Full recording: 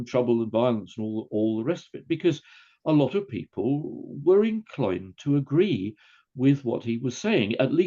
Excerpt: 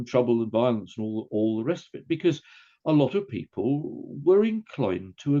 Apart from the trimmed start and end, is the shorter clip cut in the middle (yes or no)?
no